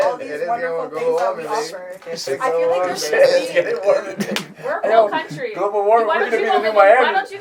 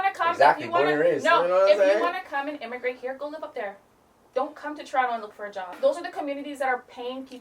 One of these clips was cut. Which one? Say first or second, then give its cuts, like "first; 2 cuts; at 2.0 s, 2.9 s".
second; 1 cut; at 5.7 s